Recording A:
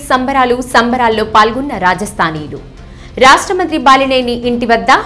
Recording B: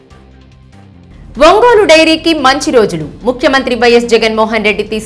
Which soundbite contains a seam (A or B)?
B